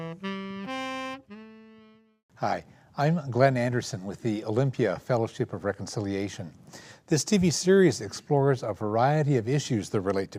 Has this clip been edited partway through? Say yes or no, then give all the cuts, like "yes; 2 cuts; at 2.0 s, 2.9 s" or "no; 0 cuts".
no; 0 cuts